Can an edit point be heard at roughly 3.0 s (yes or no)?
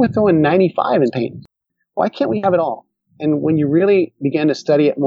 no